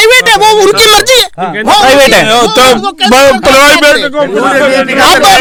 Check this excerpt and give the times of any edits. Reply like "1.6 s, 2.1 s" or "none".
none